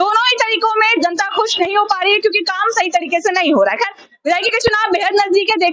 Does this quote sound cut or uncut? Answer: uncut